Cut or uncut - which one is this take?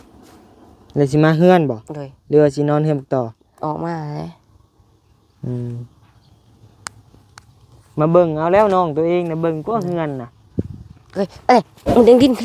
uncut